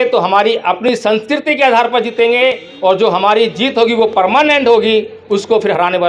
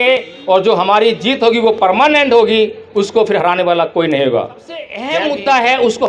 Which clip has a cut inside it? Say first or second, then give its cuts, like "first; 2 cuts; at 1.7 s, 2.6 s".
second; 1 cut; at 4.9 s